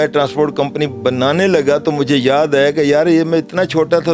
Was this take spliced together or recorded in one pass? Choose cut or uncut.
uncut